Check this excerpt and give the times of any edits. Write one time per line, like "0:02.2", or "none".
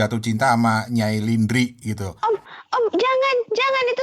0:02.1

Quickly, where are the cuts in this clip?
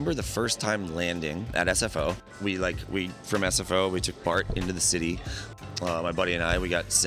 0:01.5
0:02.3
0:05.4

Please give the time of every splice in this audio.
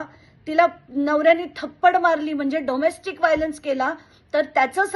none

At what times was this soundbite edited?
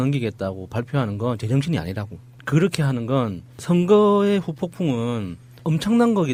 none

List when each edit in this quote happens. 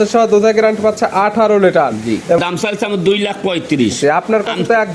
0:02.4

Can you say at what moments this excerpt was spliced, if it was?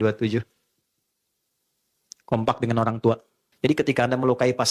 0:03.5

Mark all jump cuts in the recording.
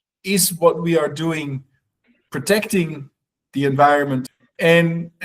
0:04.3

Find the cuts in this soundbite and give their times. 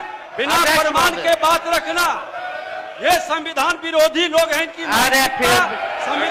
none

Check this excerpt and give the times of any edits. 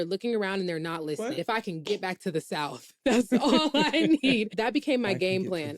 0:01.4
0:04.6

